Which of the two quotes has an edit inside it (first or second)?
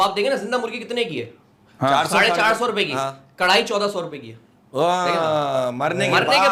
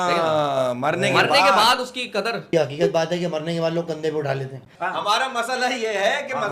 second